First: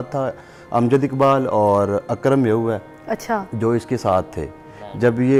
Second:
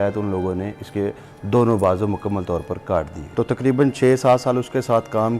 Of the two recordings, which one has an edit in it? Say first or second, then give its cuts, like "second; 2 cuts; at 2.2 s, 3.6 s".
second; 1 cut; at 3.2 s